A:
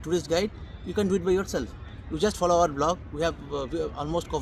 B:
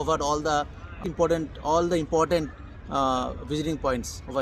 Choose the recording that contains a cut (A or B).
B